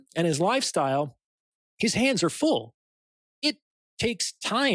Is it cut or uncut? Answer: uncut